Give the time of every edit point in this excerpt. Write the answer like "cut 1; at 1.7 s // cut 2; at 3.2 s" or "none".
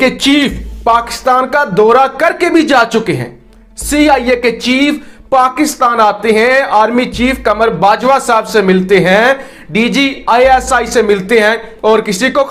none